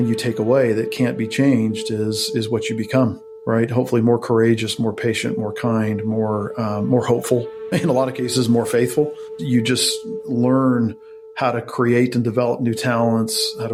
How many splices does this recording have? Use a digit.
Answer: 0